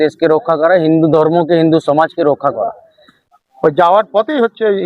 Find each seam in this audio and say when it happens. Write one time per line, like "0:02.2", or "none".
0:03.2